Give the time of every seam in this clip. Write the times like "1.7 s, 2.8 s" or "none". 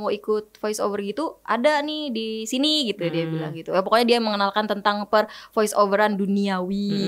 none